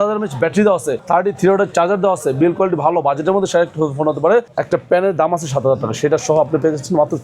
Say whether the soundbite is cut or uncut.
cut